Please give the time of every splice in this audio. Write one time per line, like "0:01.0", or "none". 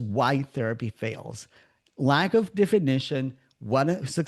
none

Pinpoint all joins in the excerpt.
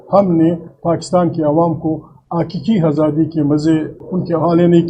0:03.9

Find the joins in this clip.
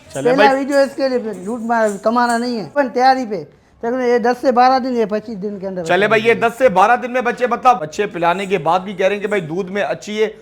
0:02.7
0:07.9

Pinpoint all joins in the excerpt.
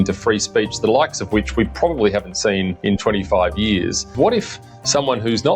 0:02.7
0:04.1

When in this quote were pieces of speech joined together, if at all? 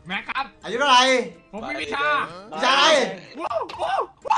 0:01.4

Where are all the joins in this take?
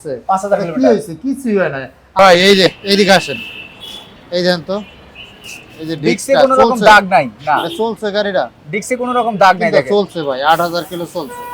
0:02.0

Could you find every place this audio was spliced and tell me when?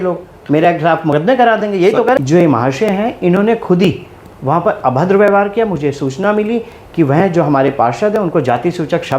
0:02.2

